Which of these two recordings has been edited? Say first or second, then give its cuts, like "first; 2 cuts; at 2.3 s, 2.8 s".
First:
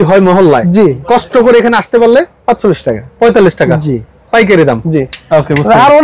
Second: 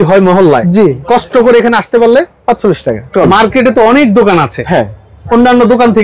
second; 1 cut; at 3.1 s